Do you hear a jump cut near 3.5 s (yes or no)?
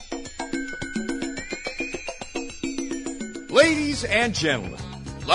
yes